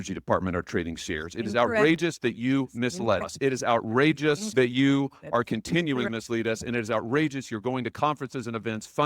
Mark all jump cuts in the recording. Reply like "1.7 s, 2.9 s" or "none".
3.2 s, 4.5 s, 6.1 s